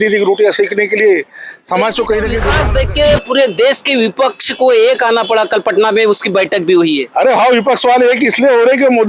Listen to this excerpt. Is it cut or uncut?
cut